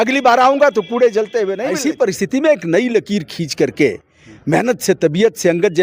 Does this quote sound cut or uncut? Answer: cut